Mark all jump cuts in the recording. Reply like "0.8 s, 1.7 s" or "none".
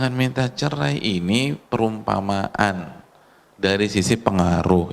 none